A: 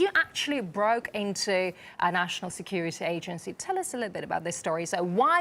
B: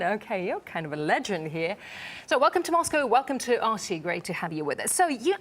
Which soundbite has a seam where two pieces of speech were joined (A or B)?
B